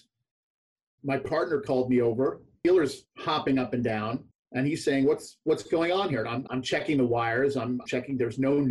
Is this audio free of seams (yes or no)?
no